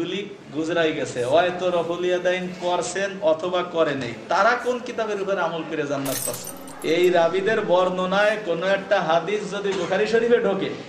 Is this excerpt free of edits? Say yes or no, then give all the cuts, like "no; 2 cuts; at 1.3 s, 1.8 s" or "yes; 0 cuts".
no; 1 cut; at 6.5 s